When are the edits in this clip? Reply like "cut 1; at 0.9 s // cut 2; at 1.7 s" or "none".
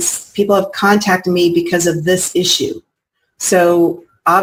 none